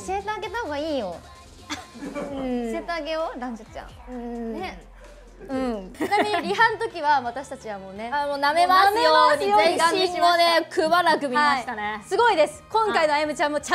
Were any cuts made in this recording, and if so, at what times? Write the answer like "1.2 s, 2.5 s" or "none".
5.9 s